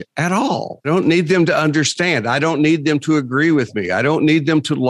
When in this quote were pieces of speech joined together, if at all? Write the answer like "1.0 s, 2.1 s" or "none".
none